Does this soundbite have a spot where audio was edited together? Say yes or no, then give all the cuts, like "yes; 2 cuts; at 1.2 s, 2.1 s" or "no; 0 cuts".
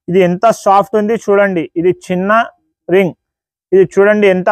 no; 0 cuts